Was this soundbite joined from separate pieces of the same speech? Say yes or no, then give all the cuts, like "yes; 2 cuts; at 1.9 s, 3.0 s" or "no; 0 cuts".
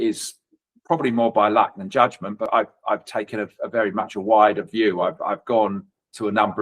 yes; 1 cut; at 2.4 s